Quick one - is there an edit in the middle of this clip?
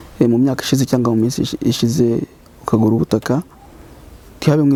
no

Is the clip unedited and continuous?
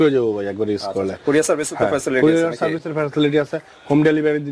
yes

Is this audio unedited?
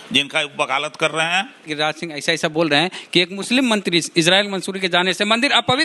no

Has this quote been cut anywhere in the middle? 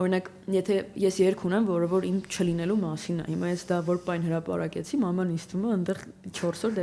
no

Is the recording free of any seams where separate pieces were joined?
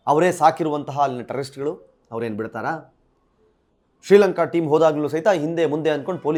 yes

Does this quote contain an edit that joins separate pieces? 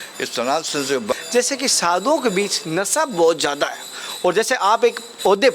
yes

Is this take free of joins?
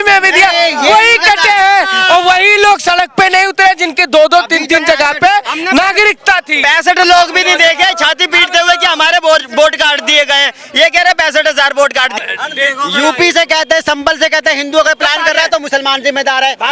no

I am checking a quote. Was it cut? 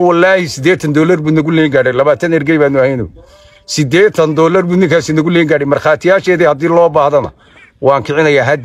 no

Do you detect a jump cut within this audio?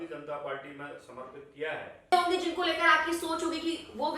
yes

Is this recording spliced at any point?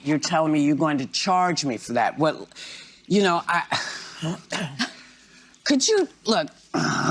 yes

